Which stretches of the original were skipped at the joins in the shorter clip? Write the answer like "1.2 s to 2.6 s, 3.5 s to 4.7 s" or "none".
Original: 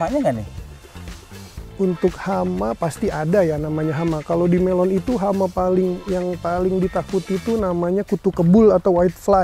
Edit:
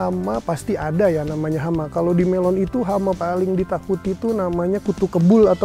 5.5 s to 6.4 s